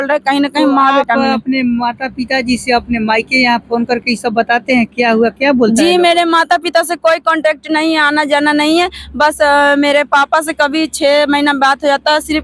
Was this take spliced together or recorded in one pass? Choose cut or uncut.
uncut